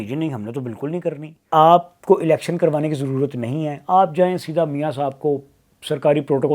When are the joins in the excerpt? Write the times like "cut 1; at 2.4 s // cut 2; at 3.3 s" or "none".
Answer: cut 1; at 1.5 s